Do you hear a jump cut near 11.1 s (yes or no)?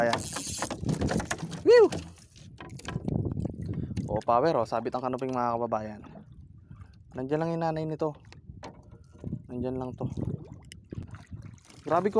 yes